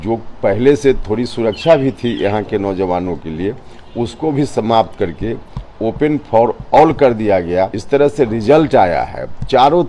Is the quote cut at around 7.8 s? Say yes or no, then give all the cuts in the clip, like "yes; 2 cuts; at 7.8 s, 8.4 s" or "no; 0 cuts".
yes; 1 cut; at 7.8 s